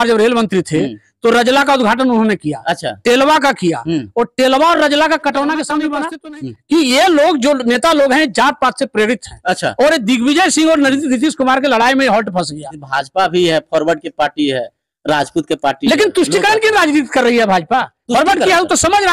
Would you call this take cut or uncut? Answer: cut